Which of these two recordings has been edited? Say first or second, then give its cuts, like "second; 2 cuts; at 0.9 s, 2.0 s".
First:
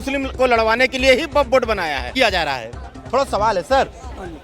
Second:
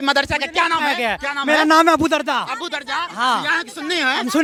first; 1 cut; at 2.1 s